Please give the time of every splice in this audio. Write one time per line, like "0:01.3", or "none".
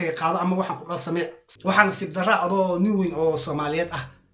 0:01.4